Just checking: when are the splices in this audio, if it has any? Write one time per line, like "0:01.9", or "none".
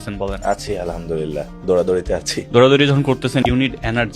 0:02.4
0:03.4